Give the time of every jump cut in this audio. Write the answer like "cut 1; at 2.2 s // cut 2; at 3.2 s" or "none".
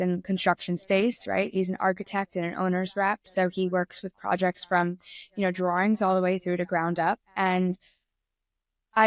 none